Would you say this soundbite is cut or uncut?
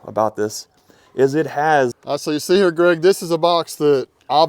cut